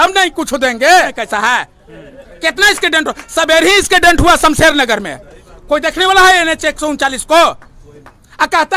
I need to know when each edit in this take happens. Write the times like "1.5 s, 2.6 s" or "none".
1.2 s